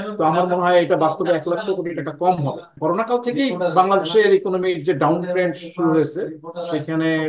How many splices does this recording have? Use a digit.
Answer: 1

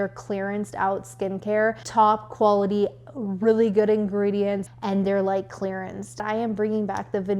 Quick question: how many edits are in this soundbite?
3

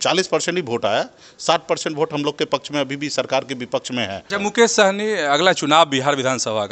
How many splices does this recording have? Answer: 1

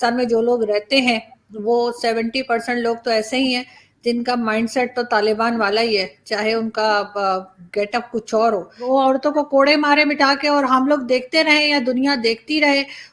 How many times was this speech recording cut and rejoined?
0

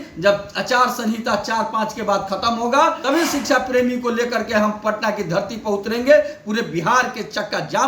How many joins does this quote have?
1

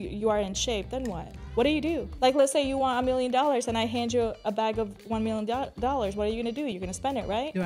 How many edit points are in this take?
2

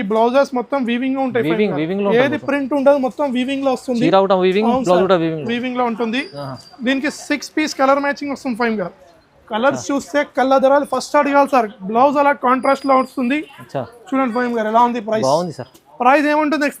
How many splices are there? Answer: 0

